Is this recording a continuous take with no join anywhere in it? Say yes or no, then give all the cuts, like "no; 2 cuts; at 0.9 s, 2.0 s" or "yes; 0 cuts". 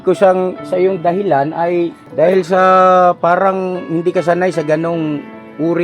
no; 1 cut; at 2.0 s